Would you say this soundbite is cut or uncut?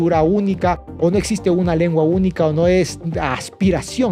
uncut